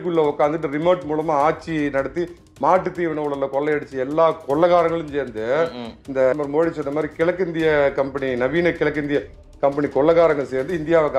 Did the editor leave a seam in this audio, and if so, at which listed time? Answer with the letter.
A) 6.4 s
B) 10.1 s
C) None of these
A